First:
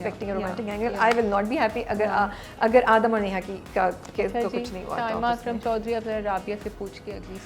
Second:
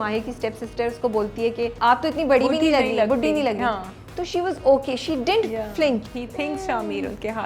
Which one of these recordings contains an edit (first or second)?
second